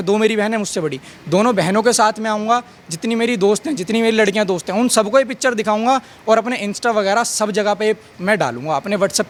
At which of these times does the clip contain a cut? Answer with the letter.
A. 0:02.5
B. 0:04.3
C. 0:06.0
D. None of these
D